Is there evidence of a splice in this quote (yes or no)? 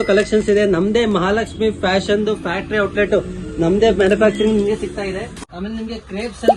yes